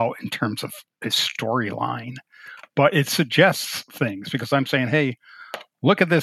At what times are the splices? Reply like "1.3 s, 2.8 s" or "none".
2.4 s